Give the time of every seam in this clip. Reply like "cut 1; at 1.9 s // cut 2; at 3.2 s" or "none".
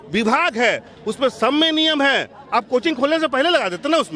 none